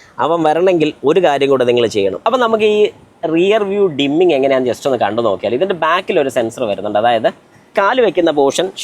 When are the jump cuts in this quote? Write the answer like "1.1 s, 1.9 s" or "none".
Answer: 2.2 s, 7.7 s